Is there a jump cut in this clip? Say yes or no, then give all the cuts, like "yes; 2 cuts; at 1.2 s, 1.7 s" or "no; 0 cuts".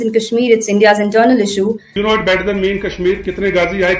yes; 1 cut; at 1.9 s